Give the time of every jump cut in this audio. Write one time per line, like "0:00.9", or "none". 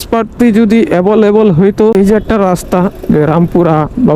0:01.9